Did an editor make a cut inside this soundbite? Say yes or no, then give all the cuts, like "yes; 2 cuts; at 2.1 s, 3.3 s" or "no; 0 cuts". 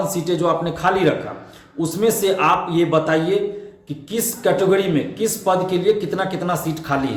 no; 0 cuts